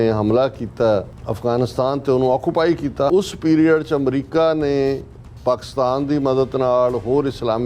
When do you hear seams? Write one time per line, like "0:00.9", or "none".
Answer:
0:01.2
0:03.1